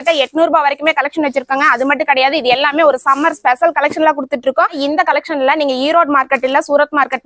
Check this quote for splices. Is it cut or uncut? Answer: cut